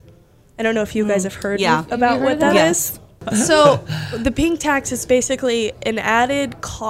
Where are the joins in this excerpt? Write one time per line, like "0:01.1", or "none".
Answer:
0:03.2